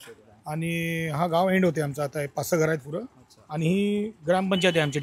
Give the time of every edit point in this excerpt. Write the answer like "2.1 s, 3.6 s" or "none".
none